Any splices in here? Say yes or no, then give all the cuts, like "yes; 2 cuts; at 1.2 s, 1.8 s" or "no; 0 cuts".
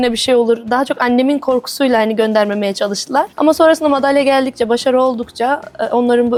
no; 0 cuts